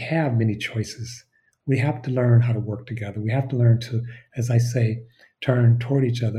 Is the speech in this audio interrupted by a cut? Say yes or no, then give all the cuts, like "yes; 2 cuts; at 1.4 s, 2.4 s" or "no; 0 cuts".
no; 0 cuts